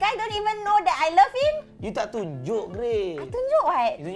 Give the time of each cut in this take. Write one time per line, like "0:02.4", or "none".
none